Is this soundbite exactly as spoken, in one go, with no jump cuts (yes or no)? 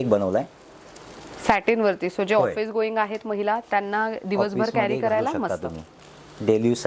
yes